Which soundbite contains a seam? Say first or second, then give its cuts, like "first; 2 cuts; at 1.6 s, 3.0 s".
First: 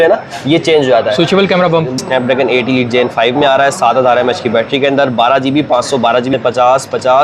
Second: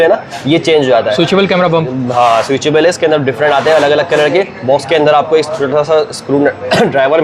first; 2 cuts; at 2.0 s, 6.3 s